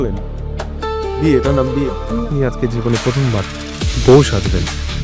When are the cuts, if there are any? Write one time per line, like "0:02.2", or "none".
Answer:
0:02.0

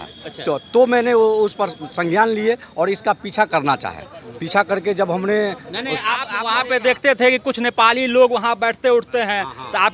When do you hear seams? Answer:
0:06.2

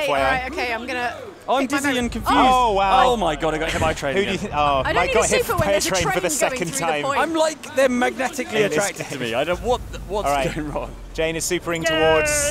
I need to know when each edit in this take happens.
none

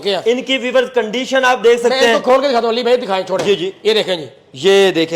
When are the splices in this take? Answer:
none

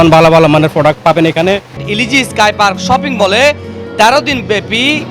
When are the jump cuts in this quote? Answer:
0:01.8

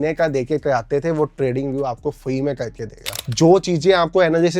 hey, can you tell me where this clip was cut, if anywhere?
0:03.2

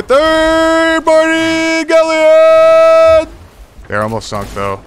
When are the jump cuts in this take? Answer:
0:03.8

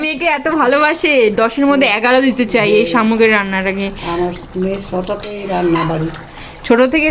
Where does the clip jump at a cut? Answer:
none

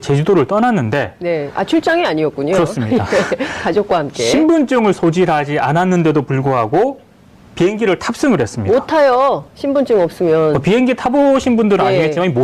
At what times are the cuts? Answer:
0:10.8

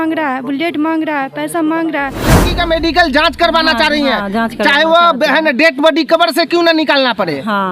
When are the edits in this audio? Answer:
0:02.5

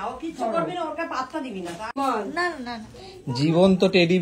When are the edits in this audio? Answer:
0:01.9

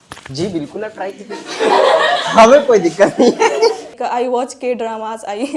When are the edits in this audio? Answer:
0:03.9

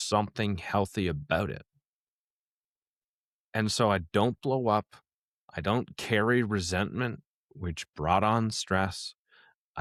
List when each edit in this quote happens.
none

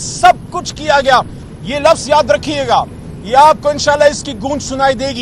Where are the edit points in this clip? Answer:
0:01.4

